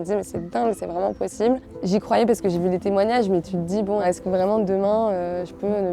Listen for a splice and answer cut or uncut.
cut